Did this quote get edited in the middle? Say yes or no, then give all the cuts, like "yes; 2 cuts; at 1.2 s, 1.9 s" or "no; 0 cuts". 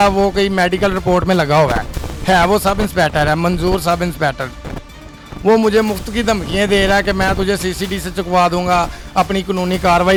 no; 0 cuts